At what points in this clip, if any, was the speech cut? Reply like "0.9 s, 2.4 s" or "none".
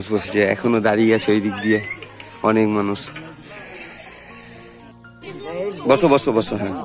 5.0 s

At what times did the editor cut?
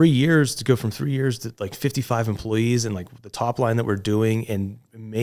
none

